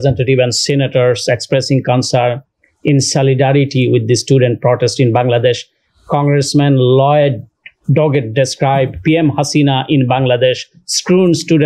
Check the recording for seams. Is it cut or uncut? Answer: uncut